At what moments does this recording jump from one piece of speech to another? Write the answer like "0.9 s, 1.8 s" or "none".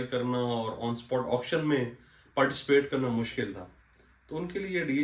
none